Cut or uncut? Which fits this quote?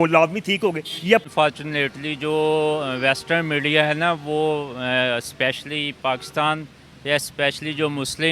cut